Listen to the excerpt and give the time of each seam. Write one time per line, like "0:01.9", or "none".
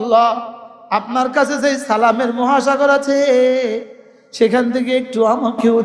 none